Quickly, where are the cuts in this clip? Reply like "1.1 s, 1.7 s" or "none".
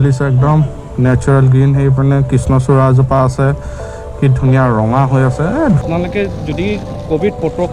5.8 s